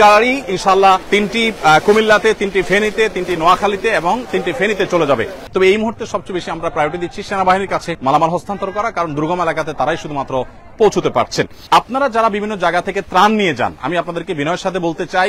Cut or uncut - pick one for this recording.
cut